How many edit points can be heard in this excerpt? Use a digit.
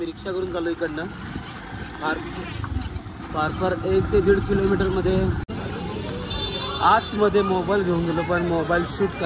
1